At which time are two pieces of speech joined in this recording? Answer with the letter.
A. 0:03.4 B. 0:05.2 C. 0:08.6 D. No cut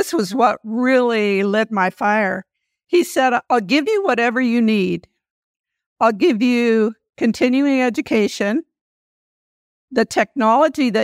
A